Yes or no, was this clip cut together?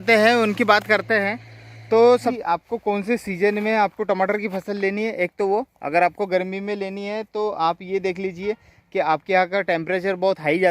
yes